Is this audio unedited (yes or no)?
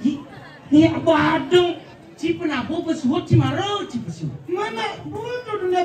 yes